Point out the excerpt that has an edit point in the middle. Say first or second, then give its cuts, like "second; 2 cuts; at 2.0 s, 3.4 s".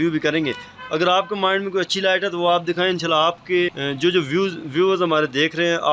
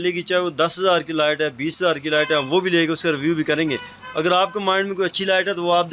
first; 1 cut; at 3.8 s